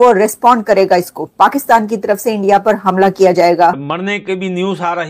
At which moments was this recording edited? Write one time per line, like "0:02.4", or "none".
0:03.8